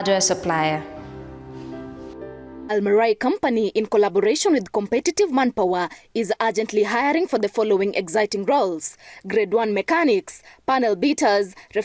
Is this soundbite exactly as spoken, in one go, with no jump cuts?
no; 1 cut; at 2.7 s

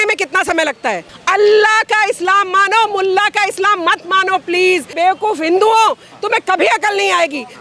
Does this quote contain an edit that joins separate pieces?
yes; 2 cuts; at 1.1 s, 4.9 s

